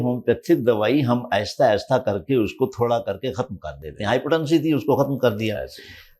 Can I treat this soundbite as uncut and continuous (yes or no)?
yes